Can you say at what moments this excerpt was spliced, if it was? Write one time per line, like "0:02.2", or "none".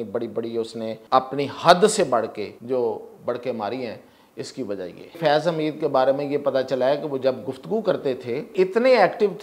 0:01.0
0:02.5
0:05.2
0:08.5